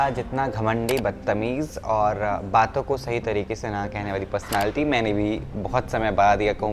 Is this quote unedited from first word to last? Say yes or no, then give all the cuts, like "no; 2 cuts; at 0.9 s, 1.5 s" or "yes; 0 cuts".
yes; 0 cuts